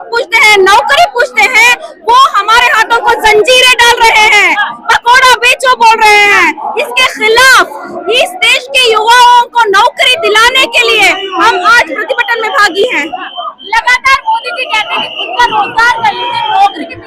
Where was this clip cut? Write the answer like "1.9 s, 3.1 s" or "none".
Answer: none